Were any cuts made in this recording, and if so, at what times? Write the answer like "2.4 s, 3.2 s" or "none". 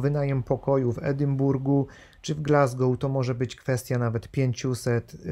none